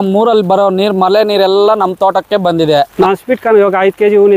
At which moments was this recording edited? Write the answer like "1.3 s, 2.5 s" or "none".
2.9 s